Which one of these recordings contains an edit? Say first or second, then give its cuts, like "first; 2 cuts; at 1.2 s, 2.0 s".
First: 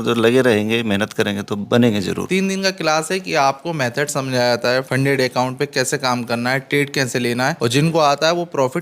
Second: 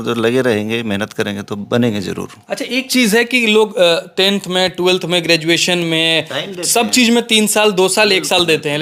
first; 3 cuts; at 2.2 s, 4.9 s, 7.6 s